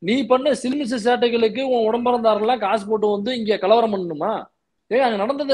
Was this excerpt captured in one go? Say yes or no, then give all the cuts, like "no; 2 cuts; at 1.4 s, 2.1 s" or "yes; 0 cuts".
yes; 0 cuts